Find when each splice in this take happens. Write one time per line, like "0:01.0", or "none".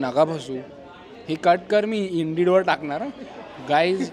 none